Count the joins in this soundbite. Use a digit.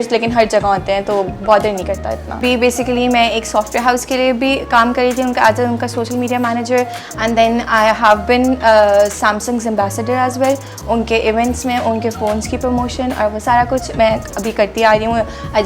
1